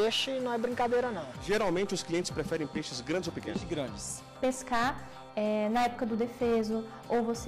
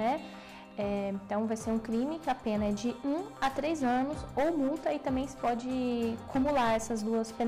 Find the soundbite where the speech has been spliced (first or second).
first